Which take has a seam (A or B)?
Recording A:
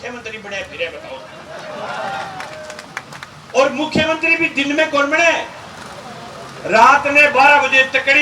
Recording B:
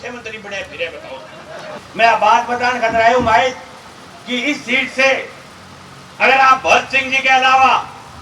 B